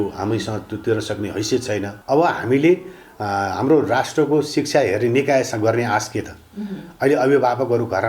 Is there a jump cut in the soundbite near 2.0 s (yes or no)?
yes